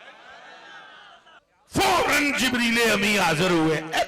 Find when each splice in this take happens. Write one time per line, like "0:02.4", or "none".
0:01.4